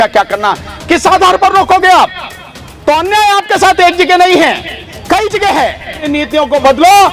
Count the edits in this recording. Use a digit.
1